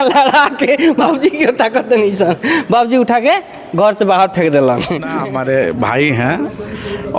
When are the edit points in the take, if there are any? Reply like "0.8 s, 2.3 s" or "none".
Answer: 5.1 s